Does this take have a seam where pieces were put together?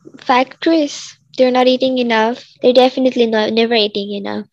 no; 0 cuts

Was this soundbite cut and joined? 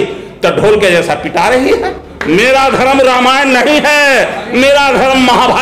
yes; 1 cut; at 2.1 s

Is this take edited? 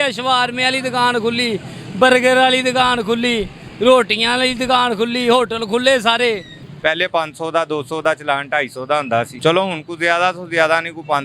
yes; 2 cuts; at 6.6 s, 9.3 s

